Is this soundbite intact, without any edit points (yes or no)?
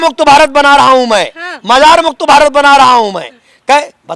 yes